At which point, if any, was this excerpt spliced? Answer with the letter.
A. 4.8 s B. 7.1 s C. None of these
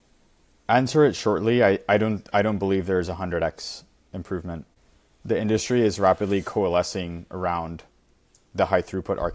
A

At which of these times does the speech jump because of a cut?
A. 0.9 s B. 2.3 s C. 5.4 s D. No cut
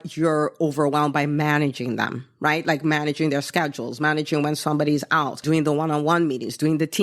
C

